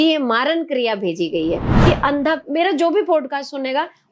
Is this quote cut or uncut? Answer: cut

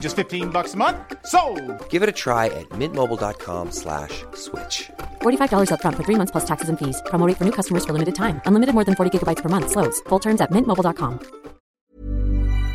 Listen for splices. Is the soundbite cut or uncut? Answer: cut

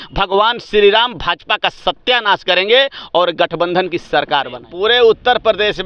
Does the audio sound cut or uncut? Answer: cut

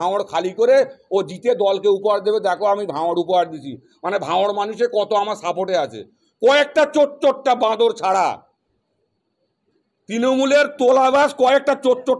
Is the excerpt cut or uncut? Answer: uncut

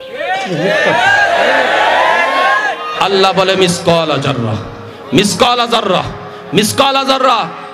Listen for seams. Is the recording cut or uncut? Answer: cut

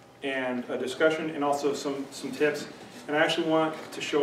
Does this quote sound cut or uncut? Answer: uncut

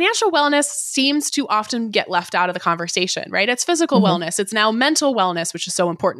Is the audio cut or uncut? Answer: uncut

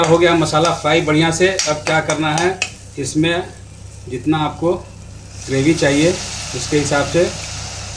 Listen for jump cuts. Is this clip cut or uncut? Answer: uncut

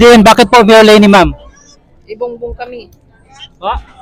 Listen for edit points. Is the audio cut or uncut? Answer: uncut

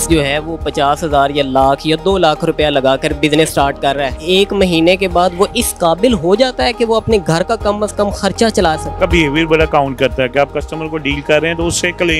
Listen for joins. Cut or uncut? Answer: cut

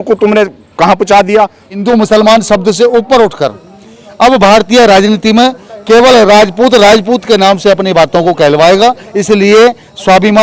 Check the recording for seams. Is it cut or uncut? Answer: cut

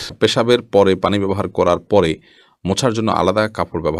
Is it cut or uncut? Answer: uncut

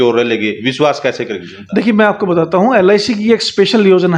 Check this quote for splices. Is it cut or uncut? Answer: uncut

